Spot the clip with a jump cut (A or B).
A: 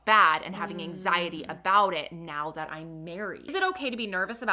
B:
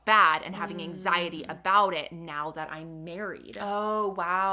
A